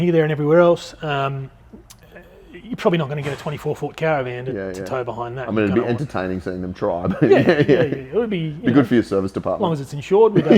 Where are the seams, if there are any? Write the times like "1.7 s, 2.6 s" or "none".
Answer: none